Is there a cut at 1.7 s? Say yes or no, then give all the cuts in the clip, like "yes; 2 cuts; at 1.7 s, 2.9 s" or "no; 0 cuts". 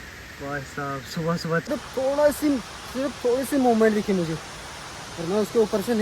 yes; 1 cut; at 1.7 s